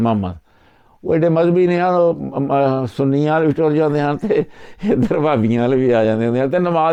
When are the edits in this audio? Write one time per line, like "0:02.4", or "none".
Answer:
none